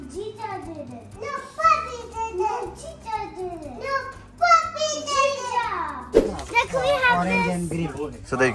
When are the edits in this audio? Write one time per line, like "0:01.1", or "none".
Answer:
0:06.3